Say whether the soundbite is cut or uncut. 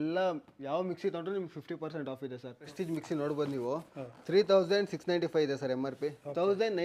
cut